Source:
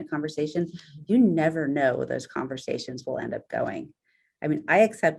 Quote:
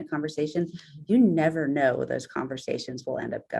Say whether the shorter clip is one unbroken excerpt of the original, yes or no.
yes